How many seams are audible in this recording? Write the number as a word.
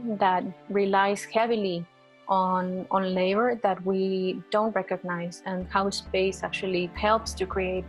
one